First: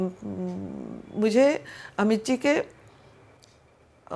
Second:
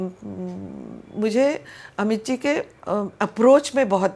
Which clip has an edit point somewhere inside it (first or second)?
second